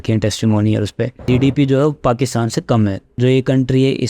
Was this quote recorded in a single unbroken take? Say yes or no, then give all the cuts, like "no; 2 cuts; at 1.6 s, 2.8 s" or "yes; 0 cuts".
no; 2 cuts; at 1.2 s, 3.0 s